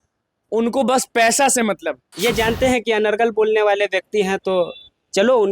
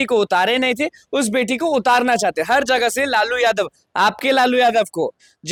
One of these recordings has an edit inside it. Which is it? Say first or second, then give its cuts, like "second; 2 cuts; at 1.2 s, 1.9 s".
first; 1 cut; at 2.0 s